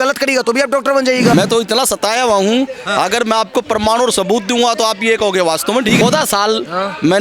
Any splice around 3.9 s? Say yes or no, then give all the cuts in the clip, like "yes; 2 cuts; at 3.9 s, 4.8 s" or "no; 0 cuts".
no; 2 cuts; at 1.3 s, 6.0 s